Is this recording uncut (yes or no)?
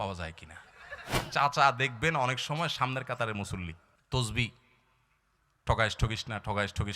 no